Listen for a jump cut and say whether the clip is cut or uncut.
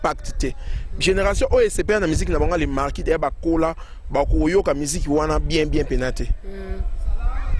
uncut